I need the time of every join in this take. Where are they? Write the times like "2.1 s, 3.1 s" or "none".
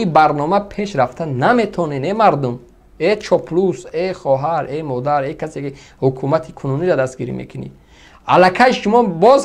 none